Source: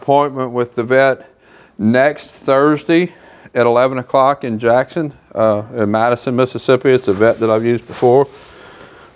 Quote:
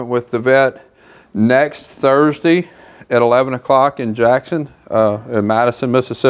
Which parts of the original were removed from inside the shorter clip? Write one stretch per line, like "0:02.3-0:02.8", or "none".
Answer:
none